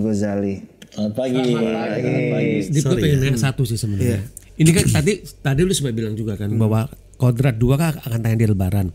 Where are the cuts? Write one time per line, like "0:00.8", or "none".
0:02.7